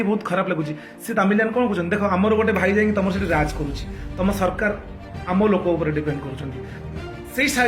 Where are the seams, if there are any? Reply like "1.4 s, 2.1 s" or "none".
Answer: 6.7 s

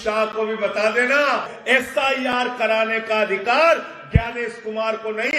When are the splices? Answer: 1.5 s

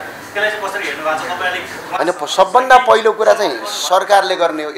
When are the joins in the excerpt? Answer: none

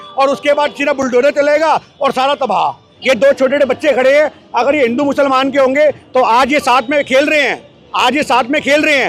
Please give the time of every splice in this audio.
2.9 s

